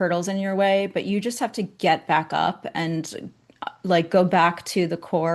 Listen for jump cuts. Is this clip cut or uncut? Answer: uncut